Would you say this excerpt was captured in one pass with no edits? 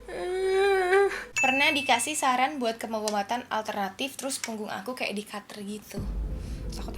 no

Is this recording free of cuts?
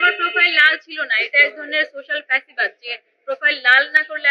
yes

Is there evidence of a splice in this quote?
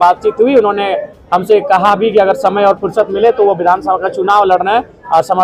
no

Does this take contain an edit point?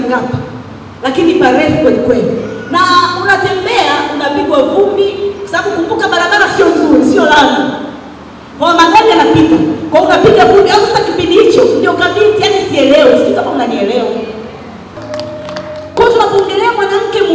yes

